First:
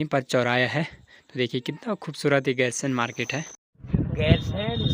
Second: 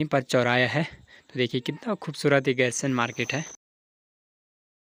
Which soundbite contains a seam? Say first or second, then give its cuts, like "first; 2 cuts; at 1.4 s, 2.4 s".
first; 1 cut; at 3.8 s